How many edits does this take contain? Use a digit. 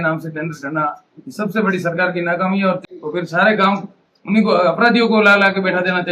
1